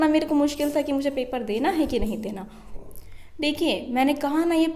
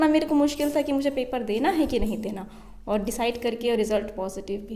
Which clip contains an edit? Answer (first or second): first